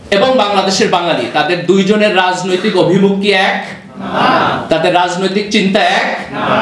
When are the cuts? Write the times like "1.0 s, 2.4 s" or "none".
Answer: none